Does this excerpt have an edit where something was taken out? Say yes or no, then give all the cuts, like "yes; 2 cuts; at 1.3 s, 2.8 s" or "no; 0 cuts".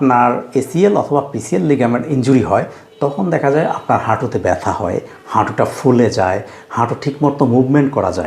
no; 0 cuts